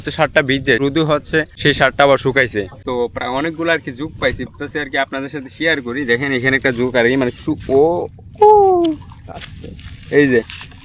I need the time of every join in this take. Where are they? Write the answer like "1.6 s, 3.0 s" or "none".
0.9 s, 2.7 s, 4.5 s